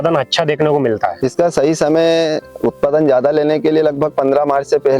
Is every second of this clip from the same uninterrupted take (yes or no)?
yes